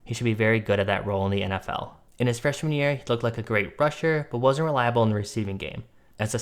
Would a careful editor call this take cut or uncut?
cut